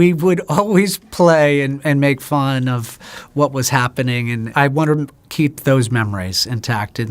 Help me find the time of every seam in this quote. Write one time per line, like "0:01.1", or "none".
0:04.5